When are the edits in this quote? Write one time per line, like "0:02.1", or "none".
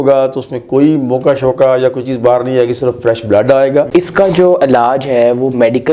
0:03.9

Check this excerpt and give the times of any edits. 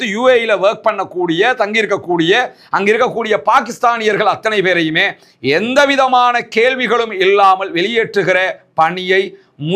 none

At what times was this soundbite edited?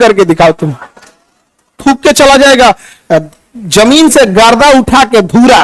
0:01.8

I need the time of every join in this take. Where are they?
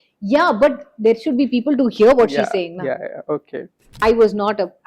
0:03.8

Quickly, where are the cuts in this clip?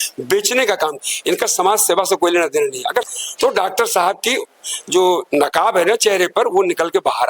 0:01.0
0:03.1

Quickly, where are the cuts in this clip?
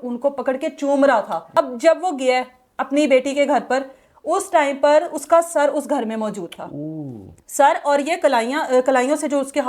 0:01.4

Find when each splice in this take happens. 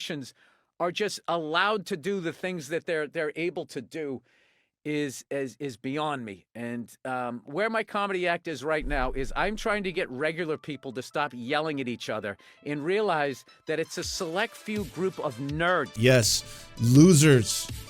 0:15.9

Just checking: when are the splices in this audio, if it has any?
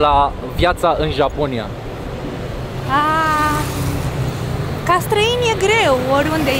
none

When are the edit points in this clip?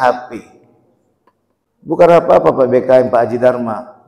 0:02.0

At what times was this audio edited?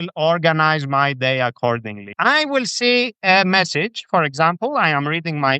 0:02.0

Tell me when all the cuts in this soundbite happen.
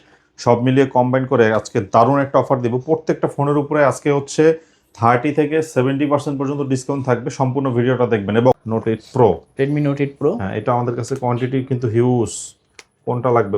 0:08.5

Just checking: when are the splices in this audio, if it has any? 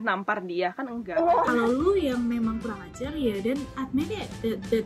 0:01.5

